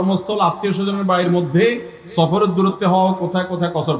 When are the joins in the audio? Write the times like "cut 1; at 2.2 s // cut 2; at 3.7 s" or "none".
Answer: none